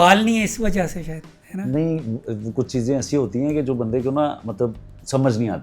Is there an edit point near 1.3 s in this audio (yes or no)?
no